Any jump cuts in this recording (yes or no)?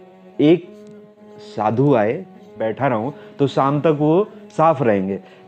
yes